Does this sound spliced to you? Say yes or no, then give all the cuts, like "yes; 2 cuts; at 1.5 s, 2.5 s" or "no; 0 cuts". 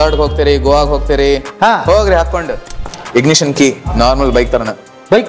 yes; 1 cut; at 3.0 s